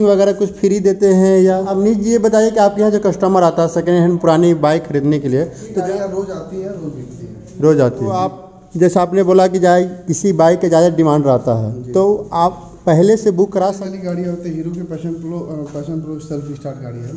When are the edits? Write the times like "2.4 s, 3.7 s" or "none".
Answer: 1.7 s, 5.7 s, 8.6 s, 13.8 s